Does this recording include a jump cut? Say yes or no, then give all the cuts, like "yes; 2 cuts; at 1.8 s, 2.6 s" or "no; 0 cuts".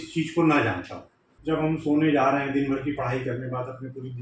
yes; 1 cut; at 1.3 s